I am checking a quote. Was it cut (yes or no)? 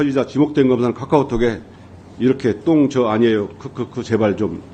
no